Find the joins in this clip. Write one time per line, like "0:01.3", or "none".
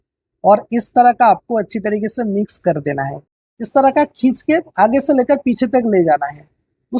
0:03.6